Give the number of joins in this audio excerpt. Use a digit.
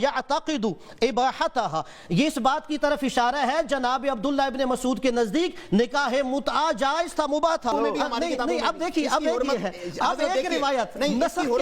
1